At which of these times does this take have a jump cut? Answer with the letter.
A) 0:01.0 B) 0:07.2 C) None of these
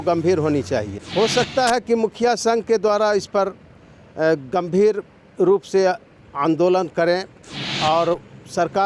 A